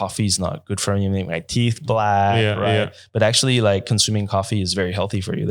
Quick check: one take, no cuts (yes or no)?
yes